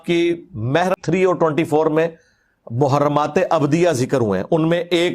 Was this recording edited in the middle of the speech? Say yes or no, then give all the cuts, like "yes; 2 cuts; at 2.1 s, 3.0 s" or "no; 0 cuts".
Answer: yes; 1 cut; at 1.0 s